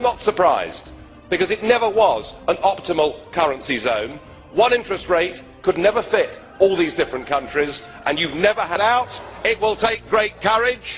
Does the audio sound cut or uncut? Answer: uncut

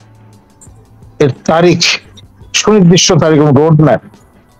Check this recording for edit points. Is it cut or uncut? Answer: uncut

